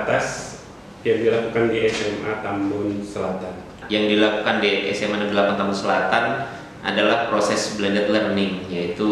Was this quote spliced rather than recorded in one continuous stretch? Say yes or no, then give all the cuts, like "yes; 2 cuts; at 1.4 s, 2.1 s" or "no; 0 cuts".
yes; 1 cut; at 3.8 s